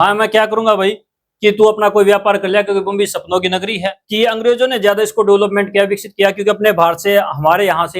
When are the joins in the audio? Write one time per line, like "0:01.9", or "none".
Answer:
0:04.0